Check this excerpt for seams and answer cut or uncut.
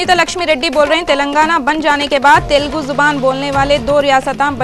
uncut